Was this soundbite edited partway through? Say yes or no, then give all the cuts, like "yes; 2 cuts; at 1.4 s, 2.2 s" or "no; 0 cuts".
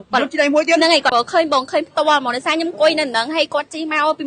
yes; 1 cut; at 1.1 s